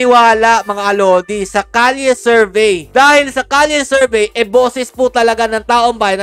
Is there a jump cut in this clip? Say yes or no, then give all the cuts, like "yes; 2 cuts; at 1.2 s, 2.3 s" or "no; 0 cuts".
no; 0 cuts